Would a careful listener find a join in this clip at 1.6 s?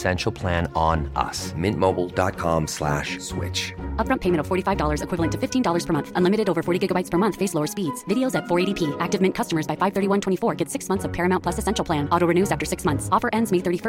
no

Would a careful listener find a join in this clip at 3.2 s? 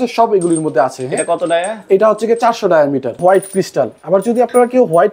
yes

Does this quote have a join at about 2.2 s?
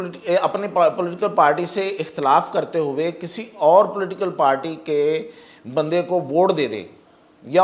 no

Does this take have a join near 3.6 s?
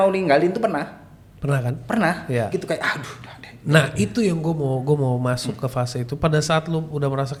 no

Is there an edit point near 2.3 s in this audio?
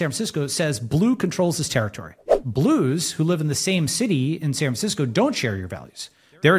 yes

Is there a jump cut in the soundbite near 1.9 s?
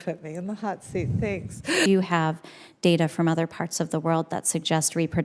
yes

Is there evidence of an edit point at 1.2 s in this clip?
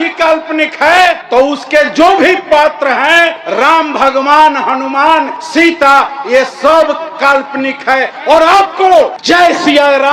yes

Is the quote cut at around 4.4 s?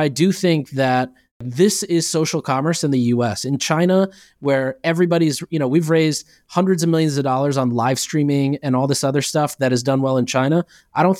no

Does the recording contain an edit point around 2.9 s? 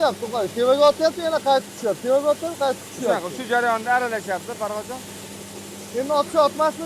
no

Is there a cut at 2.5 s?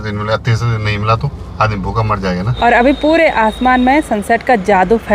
yes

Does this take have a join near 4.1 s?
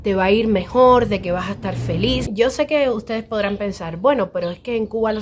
no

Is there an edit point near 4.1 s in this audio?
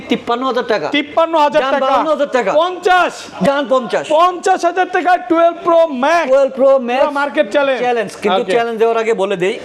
no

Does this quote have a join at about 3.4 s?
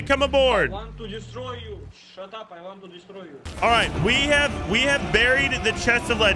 yes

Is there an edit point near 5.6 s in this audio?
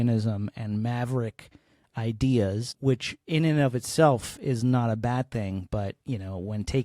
no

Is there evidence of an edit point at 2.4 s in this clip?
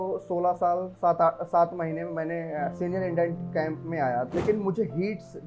no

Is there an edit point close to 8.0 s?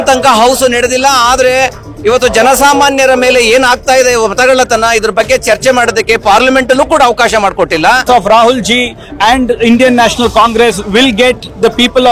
yes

